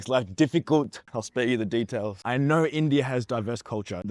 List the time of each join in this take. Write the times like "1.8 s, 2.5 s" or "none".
1.1 s, 2.2 s